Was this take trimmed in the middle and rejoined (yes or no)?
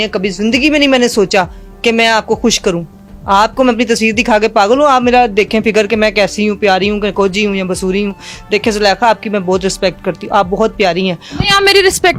no